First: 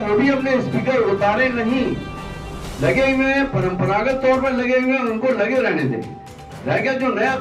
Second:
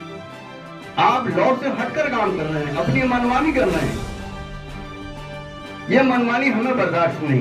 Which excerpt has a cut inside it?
second; 3 cuts; at 0.9 s, 4.0 s, 5.8 s

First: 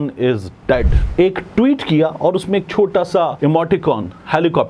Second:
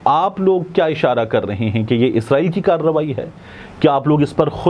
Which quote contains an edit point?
first; 2 cuts; at 1.0 s, 3.3 s

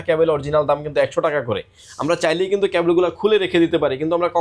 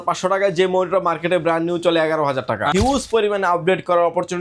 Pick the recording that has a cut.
second; 1 cut; at 2.7 s

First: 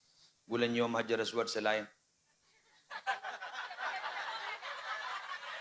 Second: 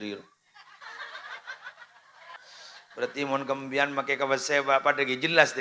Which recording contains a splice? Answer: second; 1 cut; at 2.3 s

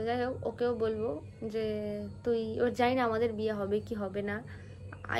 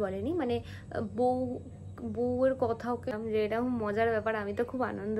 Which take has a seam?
second; 1 cut; at 3.2 s

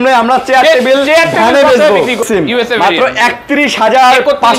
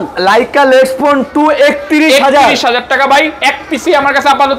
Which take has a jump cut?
first; 1 cut; at 2.2 s

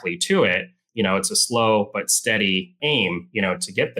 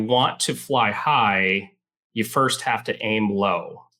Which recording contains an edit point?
first; 1 cut; at 2.7 s

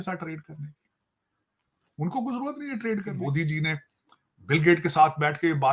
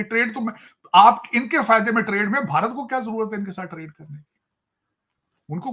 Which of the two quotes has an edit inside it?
first; 1 cut; at 3.1 s

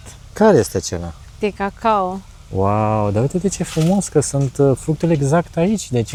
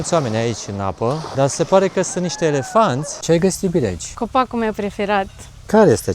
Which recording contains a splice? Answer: second; 3 cuts; at 1.2 s, 3.1 s, 4.1 s

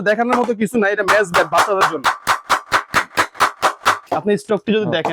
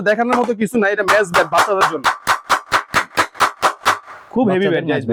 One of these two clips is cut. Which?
first; 1 cut; at 4.0 s

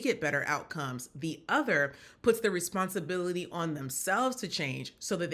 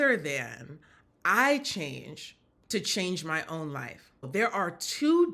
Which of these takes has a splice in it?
second; 1 cut; at 4.3 s

